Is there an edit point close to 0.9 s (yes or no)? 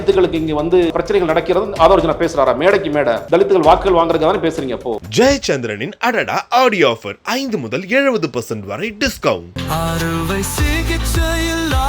yes